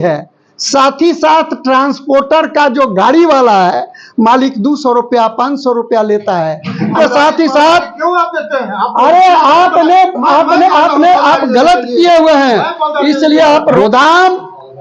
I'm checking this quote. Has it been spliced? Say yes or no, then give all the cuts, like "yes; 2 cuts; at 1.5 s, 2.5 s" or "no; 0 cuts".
yes; 2 cuts; at 6.9 s, 13.8 s